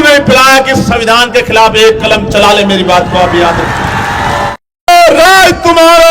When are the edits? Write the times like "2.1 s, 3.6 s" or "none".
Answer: 4.9 s

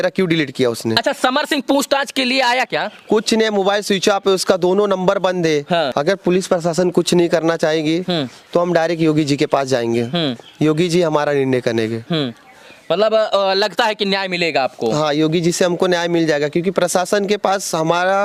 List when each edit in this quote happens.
none

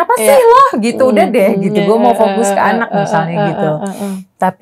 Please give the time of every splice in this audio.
none

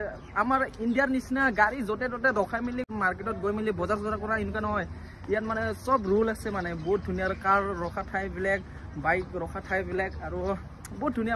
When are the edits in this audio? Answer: 2.9 s

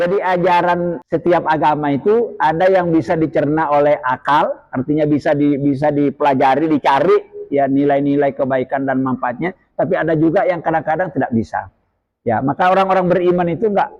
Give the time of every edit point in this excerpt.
1.0 s

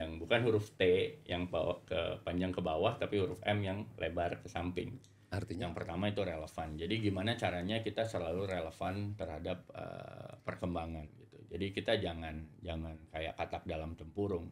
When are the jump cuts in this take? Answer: 5.5 s

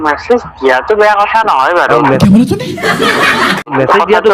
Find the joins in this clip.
none

